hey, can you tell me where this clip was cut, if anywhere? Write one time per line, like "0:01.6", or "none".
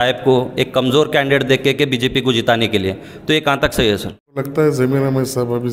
0:04.4